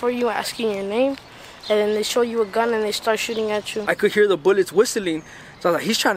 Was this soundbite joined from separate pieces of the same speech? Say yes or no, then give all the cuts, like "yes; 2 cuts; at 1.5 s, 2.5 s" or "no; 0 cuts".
yes; 1 cut; at 3.8 s